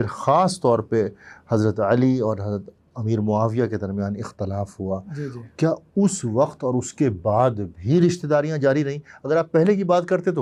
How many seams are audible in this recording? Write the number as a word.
zero